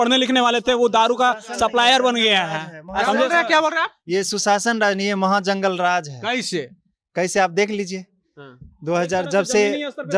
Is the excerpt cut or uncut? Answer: uncut